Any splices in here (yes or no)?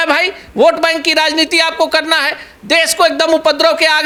no